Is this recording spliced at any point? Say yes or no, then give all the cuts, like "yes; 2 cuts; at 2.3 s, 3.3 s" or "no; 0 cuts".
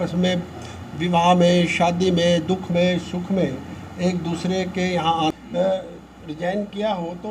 yes; 1 cut; at 5.3 s